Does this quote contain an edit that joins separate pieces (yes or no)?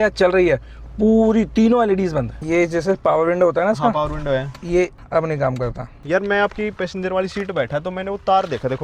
yes